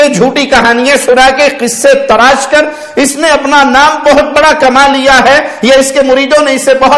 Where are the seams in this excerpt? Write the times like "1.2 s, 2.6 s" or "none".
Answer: none